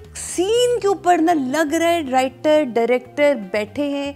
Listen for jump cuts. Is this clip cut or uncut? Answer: uncut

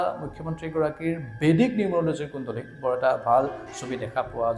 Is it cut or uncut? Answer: uncut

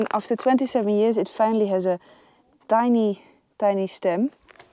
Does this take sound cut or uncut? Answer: uncut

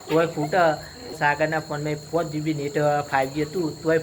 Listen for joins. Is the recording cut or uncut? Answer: cut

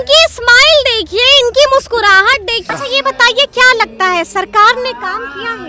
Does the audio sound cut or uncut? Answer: cut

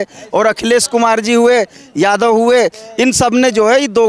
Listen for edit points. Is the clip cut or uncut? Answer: uncut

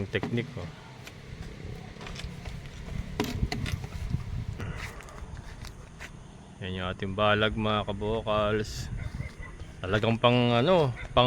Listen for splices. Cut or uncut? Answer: cut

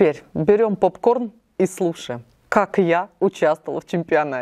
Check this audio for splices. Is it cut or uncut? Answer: uncut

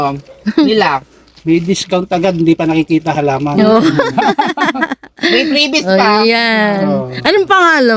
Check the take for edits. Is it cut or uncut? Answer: uncut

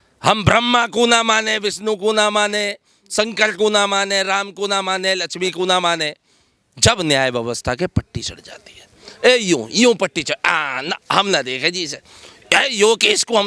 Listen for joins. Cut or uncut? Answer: uncut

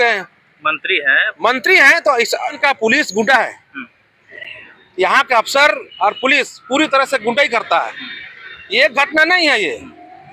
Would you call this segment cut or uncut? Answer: cut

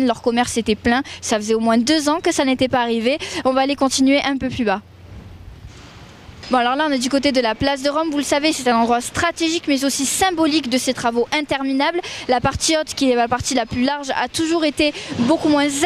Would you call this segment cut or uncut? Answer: uncut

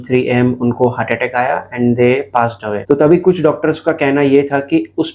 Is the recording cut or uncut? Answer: uncut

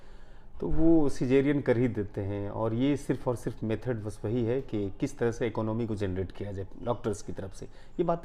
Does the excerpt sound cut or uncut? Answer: uncut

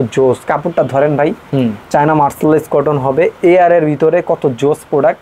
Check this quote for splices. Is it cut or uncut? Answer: cut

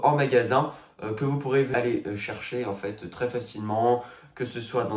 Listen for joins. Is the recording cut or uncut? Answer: cut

